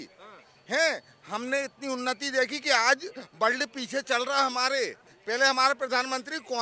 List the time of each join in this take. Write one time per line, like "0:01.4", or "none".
0:05.1